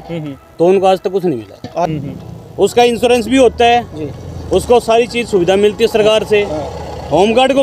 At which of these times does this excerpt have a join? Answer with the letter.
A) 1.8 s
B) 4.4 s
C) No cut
A